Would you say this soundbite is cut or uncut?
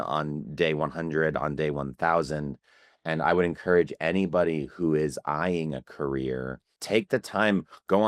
cut